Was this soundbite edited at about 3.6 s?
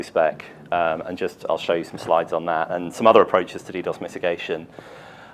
no; 1 cut; at 2.1 s

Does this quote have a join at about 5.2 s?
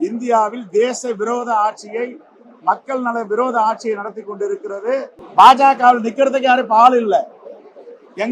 yes; 1 cut; at 5.2 s

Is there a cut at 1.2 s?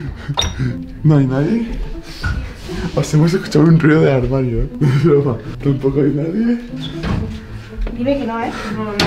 no; 3 cuts; at 4.7 s, 5.5 s, 6.8 s

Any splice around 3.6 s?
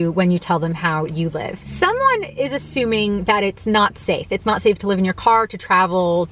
no; 1 cut; at 1.6 s

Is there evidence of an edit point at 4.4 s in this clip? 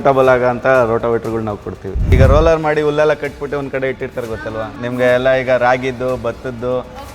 no; 1 cut; at 2.1 s

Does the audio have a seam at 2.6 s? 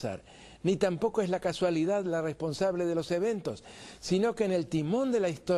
no; 1 cut; at 1.3 s

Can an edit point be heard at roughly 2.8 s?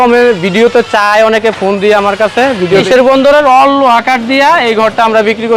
yes; 1 cut; at 2.8 s

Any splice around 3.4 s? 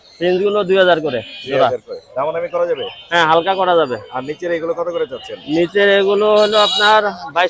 no; 0 cuts

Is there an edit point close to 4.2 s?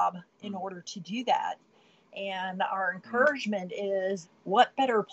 yes; 1 cut; at 4.2 s

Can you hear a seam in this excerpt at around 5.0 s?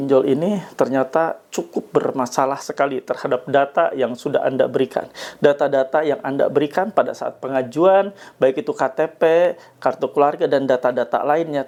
no; 0 cuts

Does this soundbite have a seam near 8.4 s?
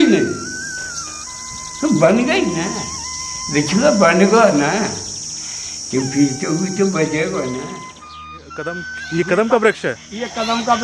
yes; 1 cut; at 8.4 s

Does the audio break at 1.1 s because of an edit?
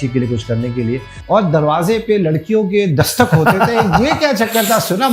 yes; 1 cut; at 1.1 s

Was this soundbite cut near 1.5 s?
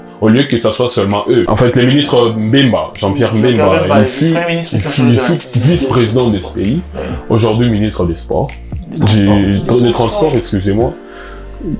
yes; 1 cut; at 1.5 s

